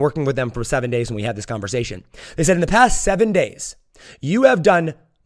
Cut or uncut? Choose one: uncut